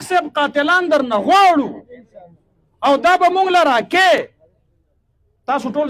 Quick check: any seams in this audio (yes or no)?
no